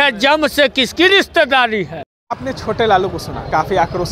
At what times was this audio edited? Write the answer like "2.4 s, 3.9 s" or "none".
none